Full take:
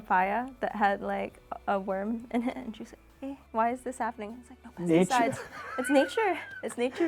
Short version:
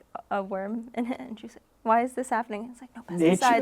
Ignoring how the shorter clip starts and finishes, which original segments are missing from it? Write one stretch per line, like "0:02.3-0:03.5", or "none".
0:03.1-0:03.4